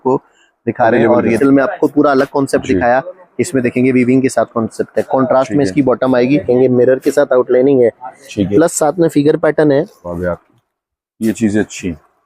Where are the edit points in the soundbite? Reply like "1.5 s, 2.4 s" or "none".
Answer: 1.4 s, 6.4 s, 10.1 s